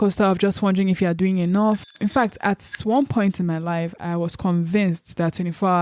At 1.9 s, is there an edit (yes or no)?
yes